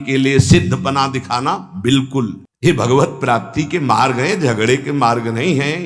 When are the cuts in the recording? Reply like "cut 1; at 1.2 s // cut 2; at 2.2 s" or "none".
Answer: cut 1; at 2.5 s

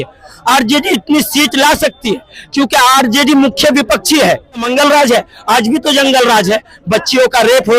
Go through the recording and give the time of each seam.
cut 1; at 4.7 s

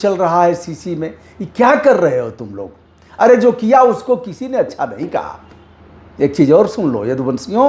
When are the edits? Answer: none

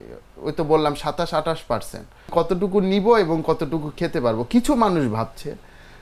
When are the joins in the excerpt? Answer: cut 1; at 2.3 s

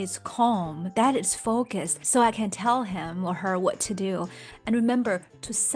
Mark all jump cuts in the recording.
cut 1; at 4.5 s

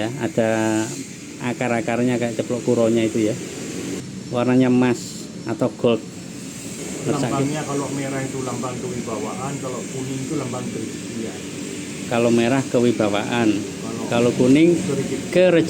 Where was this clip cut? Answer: none

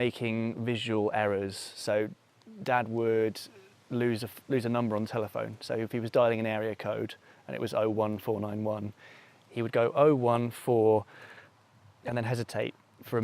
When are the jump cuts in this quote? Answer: cut 1; at 3.1 s

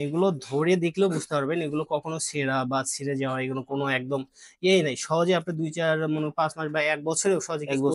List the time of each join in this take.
none

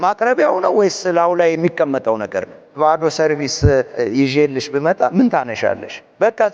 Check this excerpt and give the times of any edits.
cut 1; at 2.8 s // cut 2; at 3.9 s

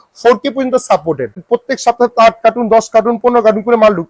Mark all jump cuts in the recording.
cut 1; at 1.4 s

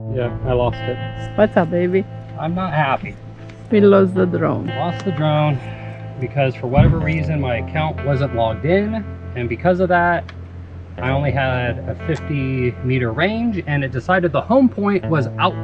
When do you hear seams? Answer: cut 1; at 1.1 s

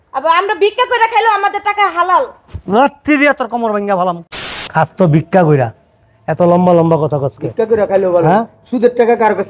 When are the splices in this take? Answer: cut 1; at 4.3 s

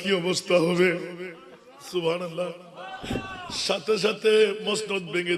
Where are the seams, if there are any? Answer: none

